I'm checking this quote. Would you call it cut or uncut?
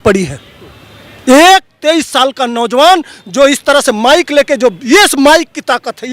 uncut